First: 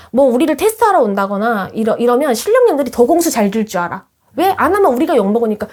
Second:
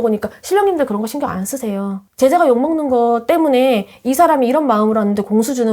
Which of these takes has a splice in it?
second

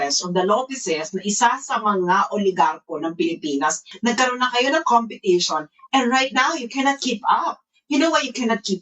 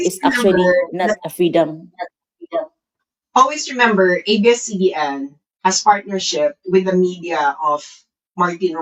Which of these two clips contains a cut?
first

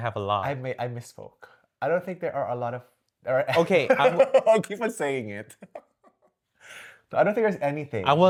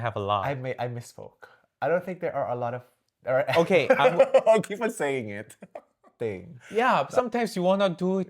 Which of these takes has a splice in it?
second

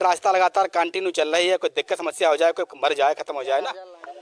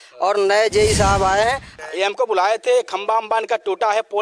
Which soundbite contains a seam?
second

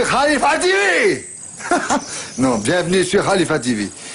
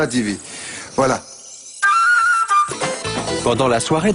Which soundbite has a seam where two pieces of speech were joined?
second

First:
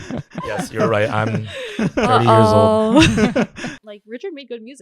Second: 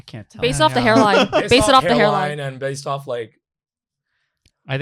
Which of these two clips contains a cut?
first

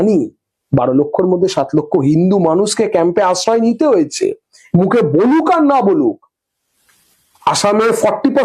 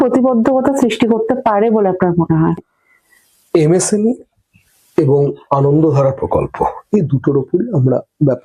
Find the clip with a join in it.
second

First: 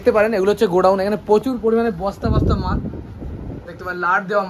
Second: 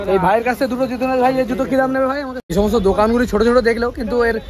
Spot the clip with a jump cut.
second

